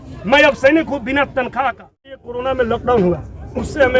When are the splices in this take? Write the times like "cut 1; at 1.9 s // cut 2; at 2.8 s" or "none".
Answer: cut 1; at 2.2 s